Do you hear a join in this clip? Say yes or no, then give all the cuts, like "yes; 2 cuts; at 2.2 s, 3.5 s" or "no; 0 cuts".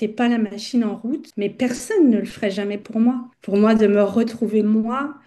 yes; 1 cut; at 3.3 s